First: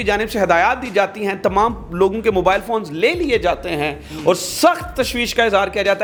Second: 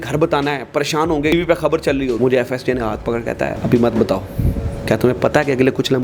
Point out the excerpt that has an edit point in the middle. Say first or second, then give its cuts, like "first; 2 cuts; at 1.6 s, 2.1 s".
second; 3 cuts; at 1.3 s, 2.2 s, 3.6 s